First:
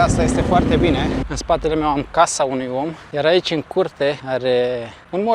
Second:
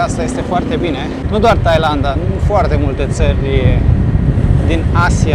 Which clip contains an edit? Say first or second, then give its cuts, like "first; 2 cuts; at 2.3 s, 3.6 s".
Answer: first; 2 cuts; at 1.2 s, 4.2 s